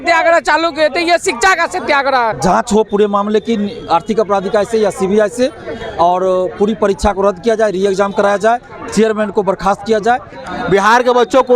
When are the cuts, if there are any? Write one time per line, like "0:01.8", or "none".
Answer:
0:02.4
0:10.4